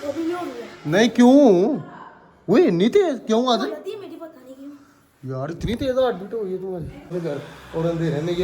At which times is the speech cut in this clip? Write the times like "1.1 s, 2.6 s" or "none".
7.1 s

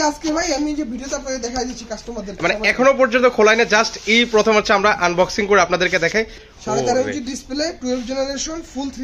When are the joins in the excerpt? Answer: 6.4 s

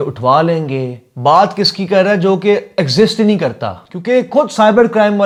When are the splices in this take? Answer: none

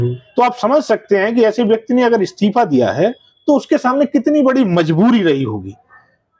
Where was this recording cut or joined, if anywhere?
none

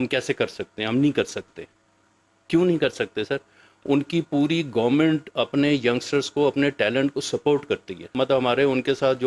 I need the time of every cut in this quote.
8.1 s

